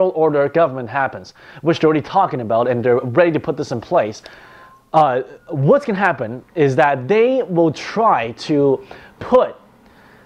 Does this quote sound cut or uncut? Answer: cut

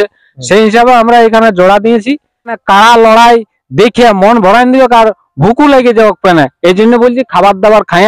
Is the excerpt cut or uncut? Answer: cut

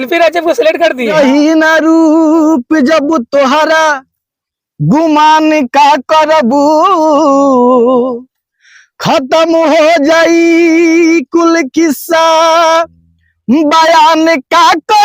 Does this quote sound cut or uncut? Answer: cut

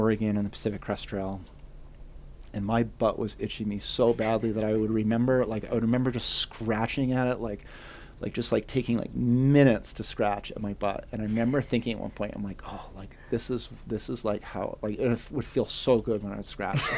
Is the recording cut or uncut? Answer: uncut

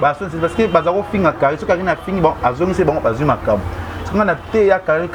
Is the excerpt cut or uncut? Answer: uncut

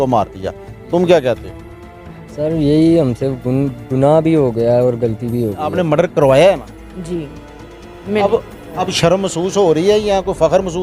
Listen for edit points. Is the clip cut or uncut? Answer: cut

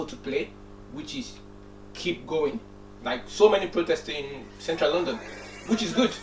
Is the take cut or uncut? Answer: uncut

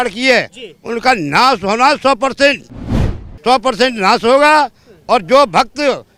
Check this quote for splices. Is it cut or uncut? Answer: uncut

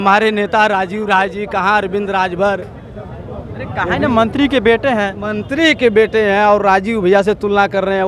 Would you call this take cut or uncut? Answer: uncut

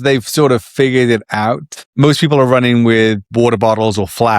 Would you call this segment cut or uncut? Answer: cut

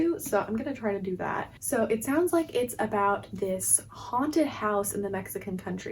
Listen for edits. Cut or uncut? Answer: uncut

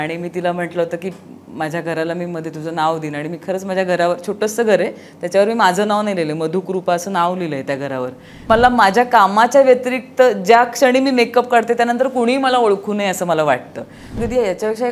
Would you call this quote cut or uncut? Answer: cut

